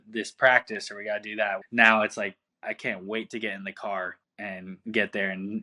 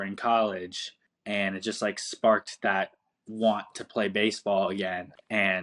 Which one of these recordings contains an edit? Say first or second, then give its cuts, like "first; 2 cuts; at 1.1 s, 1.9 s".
first; 1 cut; at 1.6 s